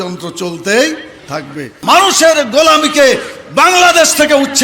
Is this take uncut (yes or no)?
no